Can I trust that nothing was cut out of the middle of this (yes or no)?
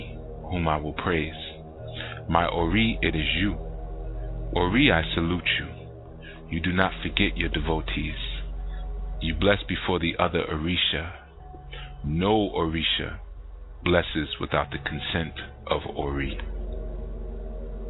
no